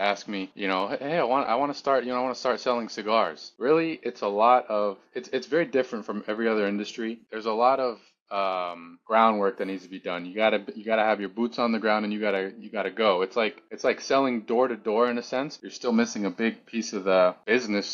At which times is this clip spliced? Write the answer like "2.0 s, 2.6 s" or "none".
3.5 s, 7.3 s, 15.6 s